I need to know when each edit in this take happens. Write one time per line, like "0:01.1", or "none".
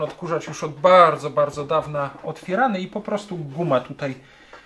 none